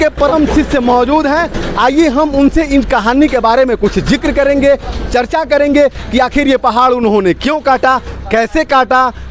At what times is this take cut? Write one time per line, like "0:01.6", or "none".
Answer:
none